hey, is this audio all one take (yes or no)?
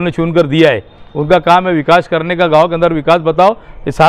yes